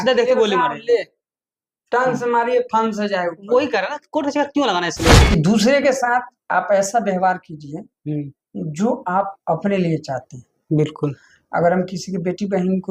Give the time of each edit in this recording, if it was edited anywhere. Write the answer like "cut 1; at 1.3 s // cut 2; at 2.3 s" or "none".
cut 1; at 5.2 s

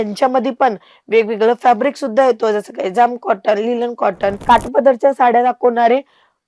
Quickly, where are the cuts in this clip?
cut 1; at 4.4 s

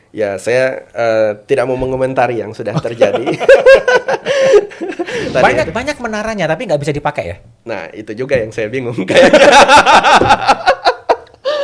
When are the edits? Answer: cut 1; at 5.3 s

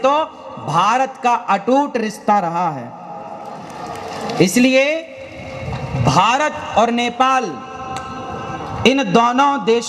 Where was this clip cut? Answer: none

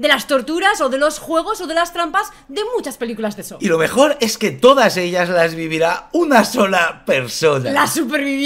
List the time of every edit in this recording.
none

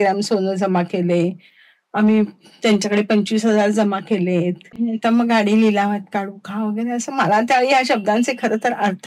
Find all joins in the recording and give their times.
cut 1; at 4.7 s

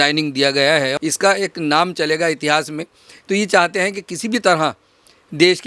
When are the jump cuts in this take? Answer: cut 1; at 0.9 s

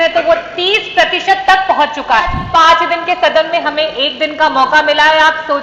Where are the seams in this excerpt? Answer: cut 1; at 2.4 s

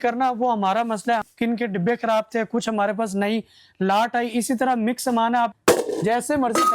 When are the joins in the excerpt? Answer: cut 1; at 1.2 s // cut 2; at 5.5 s

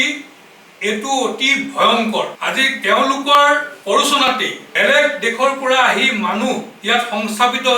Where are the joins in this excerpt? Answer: cut 1; at 2.4 s // cut 2; at 3.7 s // cut 3; at 4.6 s // cut 4; at 6.7 s

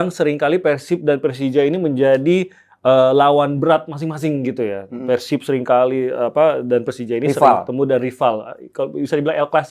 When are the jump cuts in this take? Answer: none

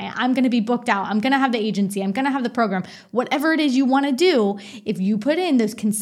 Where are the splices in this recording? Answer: none

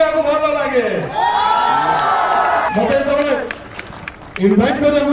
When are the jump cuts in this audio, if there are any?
cut 1; at 2.7 s

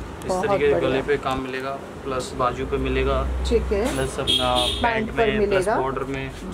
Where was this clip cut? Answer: none

